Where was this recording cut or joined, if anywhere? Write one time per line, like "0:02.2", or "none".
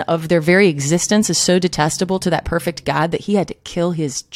none